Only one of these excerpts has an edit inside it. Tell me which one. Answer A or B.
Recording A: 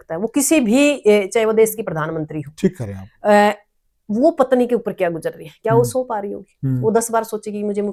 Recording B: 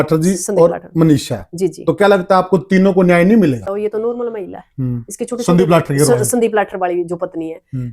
B